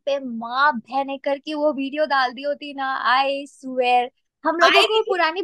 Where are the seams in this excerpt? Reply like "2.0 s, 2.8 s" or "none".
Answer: none